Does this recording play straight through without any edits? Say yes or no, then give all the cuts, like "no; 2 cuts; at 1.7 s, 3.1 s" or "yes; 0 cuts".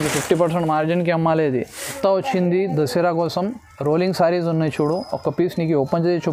no; 1 cut; at 1.9 s